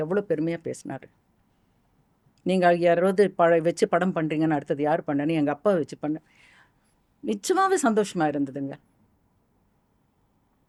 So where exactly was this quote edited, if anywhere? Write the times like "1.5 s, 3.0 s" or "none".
none